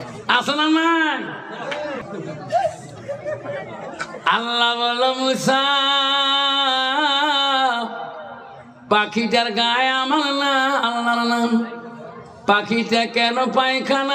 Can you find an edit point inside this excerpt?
yes; 1 cut; at 2.1 s

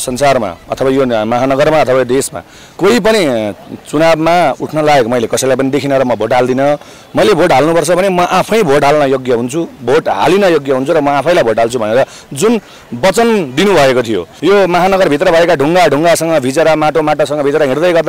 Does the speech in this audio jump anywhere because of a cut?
yes; 1 cut; at 14.2 s

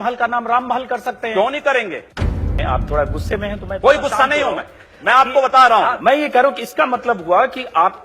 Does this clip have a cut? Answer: yes; 1 cut; at 2.5 s

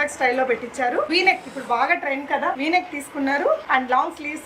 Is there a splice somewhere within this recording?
no; 0 cuts

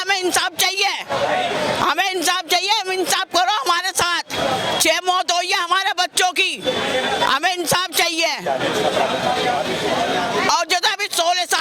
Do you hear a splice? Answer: no; 0 cuts

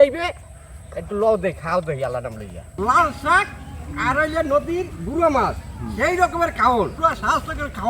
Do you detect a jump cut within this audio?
yes; 2 cuts; at 2.8 s, 6.9 s

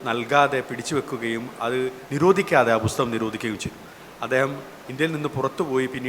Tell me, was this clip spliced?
no; 0 cuts

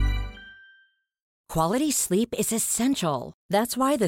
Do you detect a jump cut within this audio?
yes; 1 cut; at 1.4 s

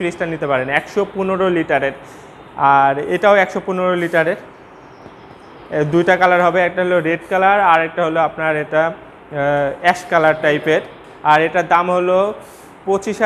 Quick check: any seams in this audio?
no; 0 cuts

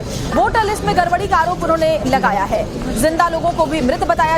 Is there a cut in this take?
no; 0 cuts

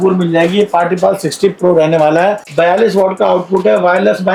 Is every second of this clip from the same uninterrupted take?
yes; 0 cuts

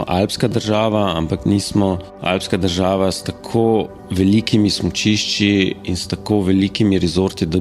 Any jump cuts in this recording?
yes; 2 cuts; at 2.1 s, 4.0 s

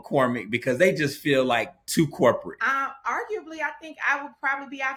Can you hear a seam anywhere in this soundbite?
no; 0 cuts

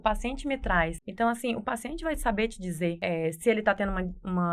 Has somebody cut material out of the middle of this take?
yes; 2 cuts; at 1.0 s, 3.0 s

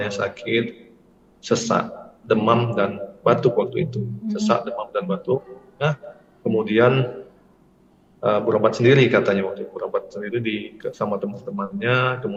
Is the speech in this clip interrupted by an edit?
no; 0 cuts

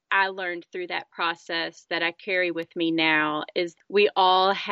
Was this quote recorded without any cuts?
no; 1 cut; at 3.7 s

